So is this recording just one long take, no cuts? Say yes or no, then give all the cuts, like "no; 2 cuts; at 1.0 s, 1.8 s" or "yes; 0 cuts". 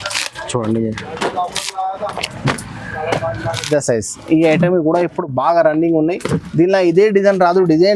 no; 1 cut; at 3.7 s